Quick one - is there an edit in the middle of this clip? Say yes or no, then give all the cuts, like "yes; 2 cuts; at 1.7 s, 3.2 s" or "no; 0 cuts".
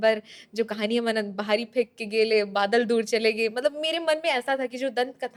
no; 0 cuts